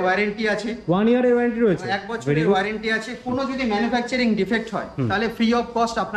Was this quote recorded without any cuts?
yes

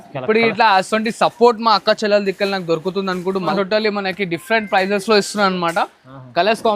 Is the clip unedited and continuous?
no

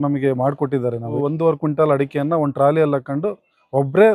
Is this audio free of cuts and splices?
no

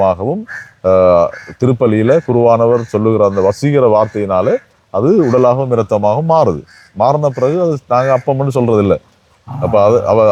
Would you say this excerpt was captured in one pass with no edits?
yes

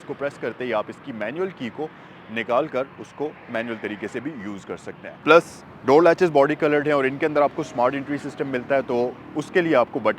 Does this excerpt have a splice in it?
yes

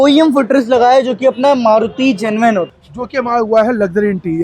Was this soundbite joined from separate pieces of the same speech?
yes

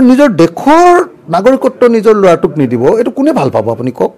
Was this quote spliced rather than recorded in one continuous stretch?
no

